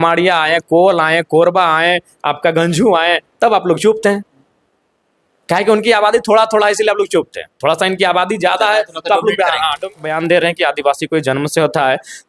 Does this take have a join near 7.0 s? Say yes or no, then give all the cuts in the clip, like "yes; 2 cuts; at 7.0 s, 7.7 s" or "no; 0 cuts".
no; 1 cut; at 10.0 s